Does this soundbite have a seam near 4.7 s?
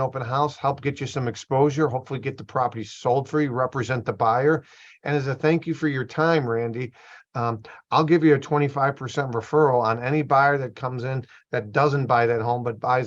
no; 0 cuts

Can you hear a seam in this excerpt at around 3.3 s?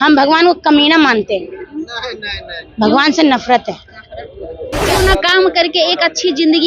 no; 1 cut; at 4.9 s

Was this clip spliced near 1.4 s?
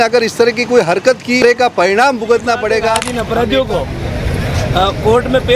yes; 2 cuts; at 1.4 s, 3.1 s

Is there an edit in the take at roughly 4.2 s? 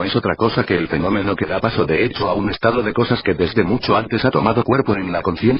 yes; 1 cut; at 4.2 s

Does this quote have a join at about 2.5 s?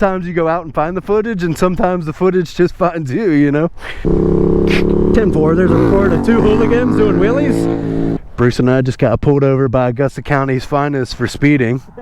no; 2 cuts; at 4.0 s, 7.9 s

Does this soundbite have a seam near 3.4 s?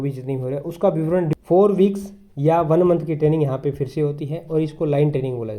no; 1 cut; at 1.3 s

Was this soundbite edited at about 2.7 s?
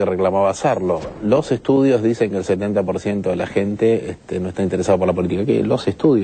no; 0 cuts

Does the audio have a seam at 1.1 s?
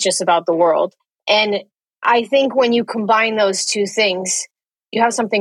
yes; 1 cut; at 1.1 s

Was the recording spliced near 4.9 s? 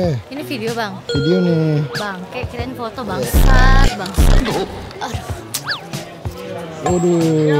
yes; 1 cut; at 4.9 s

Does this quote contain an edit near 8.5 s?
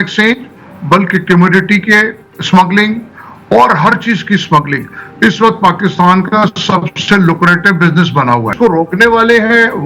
yes; 1 cut; at 8.5 s

